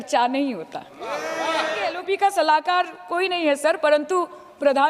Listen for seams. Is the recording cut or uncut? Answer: cut